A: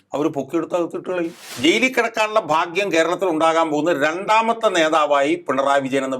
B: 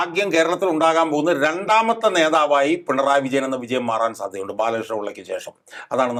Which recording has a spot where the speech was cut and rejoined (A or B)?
A